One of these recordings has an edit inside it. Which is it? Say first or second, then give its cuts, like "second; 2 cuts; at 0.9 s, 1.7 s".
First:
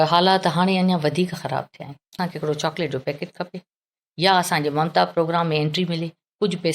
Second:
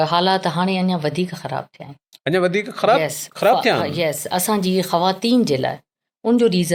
first; 1 cut; at 2.2 s